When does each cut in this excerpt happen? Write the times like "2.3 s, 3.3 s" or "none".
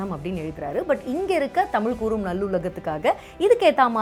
none